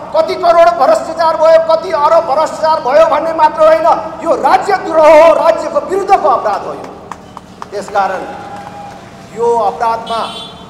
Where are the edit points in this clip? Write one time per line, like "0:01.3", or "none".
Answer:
none

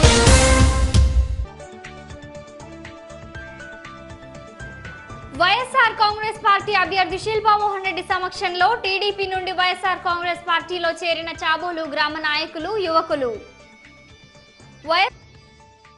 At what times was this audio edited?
0:01.3

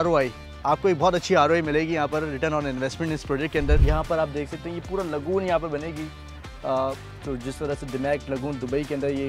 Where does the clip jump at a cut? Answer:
0:03.8

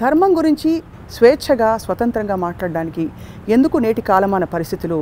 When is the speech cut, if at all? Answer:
none

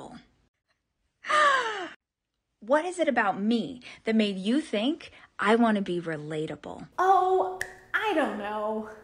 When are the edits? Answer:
none

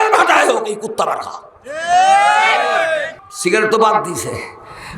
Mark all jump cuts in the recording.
0:03.1

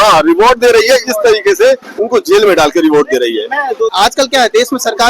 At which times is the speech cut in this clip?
0:03.9

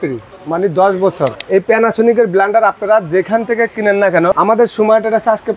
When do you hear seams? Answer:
0:01.4
0:04.4

